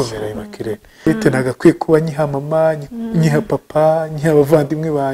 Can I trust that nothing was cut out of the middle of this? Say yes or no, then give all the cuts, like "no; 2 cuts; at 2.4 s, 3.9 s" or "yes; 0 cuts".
no; 1 cut; at 1.1 s